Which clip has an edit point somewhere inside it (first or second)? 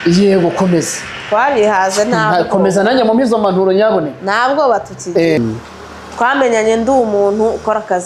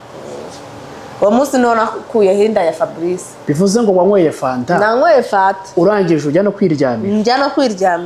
first